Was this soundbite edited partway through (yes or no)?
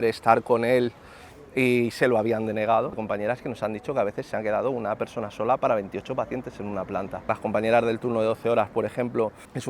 yes